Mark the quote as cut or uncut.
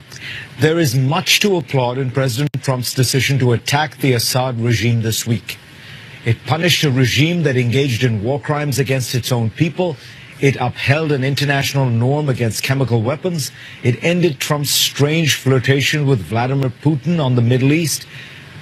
uncut